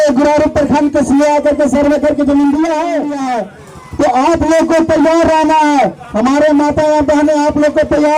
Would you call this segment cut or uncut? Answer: cut